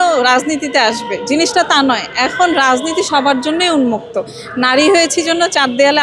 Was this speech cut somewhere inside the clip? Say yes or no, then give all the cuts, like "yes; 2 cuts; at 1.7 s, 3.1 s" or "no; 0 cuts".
no; 0 cuts